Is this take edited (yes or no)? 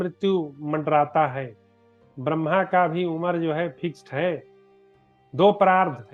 no